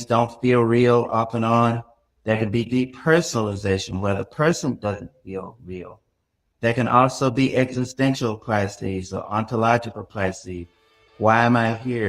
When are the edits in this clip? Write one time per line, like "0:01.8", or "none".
0:06.4